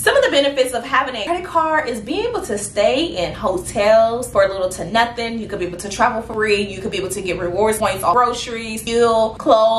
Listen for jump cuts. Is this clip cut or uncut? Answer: cut